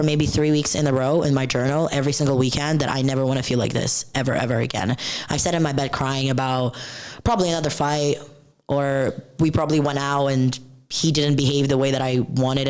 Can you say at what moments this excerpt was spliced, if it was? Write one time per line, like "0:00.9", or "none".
none